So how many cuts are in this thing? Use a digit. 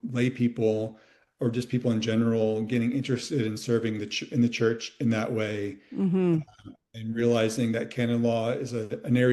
0